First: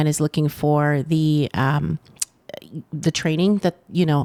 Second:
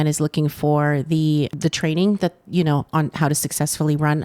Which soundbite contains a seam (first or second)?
second